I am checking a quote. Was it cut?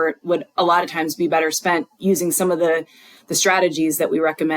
no; 0 cuts

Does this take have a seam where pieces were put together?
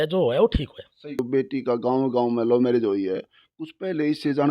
yes; 1 cut; at 1.2 s

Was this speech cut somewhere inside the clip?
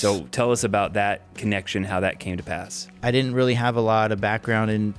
yes; 1 cut; at 3.0 s

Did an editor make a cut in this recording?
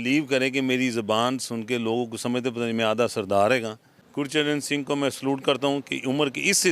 yes; 1 cut; at 4.0 s

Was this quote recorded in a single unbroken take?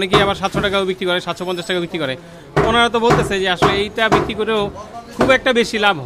yes; 0 cuts

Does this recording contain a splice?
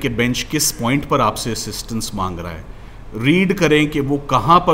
no; 0 cuts

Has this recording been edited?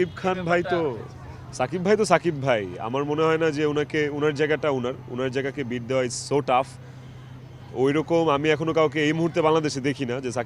no; 0 cuts

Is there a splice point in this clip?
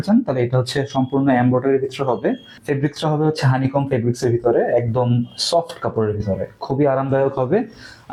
no; 0 cuts

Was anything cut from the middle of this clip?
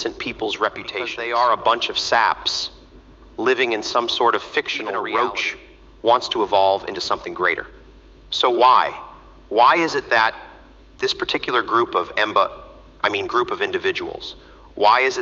yes; 2 cuts; at 1.2 s, 4.8 s

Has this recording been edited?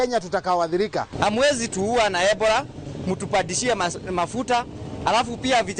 yes; 1 cut; at 1.1 s

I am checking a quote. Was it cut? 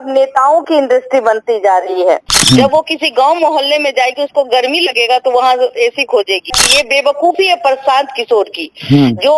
yes; 2 cuts; at 2.3 s, 6.5 s

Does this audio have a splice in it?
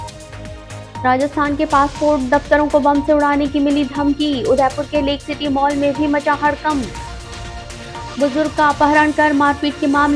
no; 0 cuts

